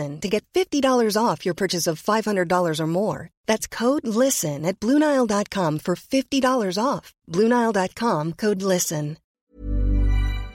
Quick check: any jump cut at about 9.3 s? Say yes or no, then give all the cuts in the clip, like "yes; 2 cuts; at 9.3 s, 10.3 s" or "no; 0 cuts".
yes; 1 cut; at 9.3 s